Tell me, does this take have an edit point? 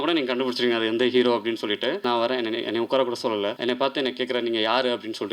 yes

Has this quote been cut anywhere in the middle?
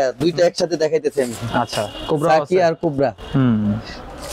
no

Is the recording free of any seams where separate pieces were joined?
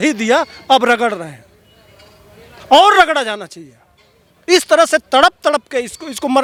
yes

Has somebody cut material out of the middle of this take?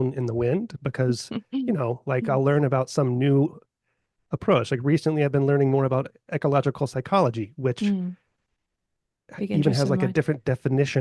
no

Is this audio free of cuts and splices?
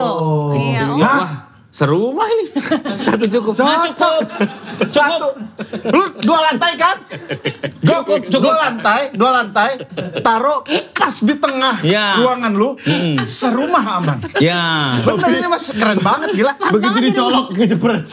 yes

